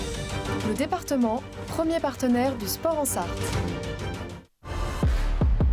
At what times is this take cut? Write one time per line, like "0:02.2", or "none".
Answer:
0:04.8